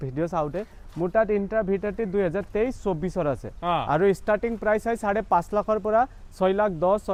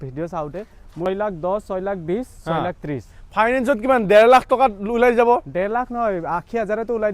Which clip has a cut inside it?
second; 1 cut; at 1.1 s

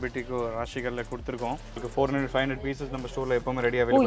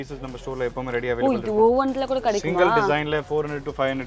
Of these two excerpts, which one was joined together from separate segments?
first; 1 cut; at 1.8 s

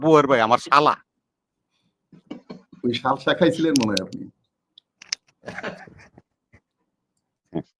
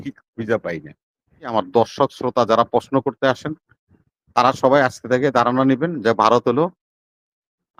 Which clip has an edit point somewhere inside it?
second; 1 cut; at 1.4 s

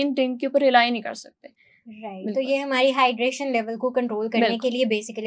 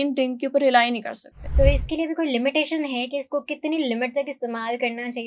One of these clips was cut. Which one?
second; 1 cut; at 1.5 s

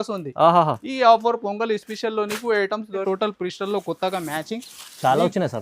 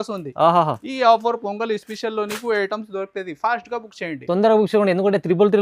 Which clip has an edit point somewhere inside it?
first; 1 cut; at 3.0 s

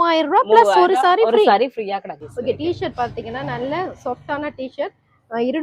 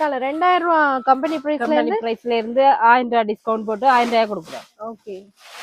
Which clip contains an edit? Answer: first; 1 cut; at 2.2 s

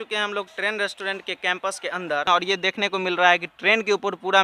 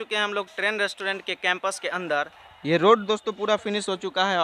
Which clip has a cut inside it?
first; 1 cut; at 2.3 s

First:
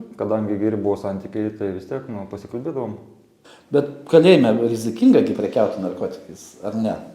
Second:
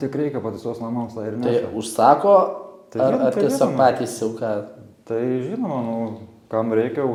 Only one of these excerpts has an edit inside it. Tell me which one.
first; 1 cut; at 3.5 s

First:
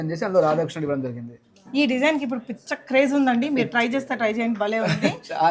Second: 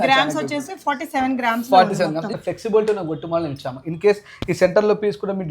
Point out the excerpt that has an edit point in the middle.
second; 1 cut; at 2.3 s

